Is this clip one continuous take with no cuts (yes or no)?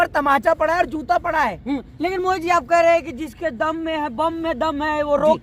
yes